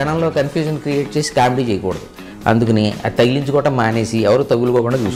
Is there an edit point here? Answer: no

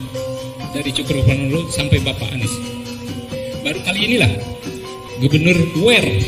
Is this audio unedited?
yes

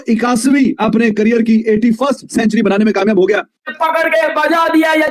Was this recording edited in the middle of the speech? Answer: yes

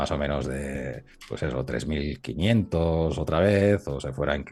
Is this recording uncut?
yes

